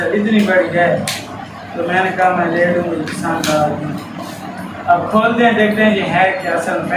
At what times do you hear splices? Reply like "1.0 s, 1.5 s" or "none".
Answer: none